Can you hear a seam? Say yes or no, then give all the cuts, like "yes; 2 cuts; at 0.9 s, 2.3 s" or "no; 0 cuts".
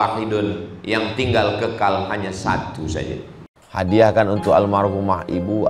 yes; 1 cut; at 3.5 s